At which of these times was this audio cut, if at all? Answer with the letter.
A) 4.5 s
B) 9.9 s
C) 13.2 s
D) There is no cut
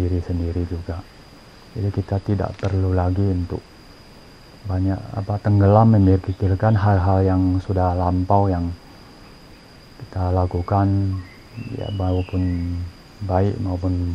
D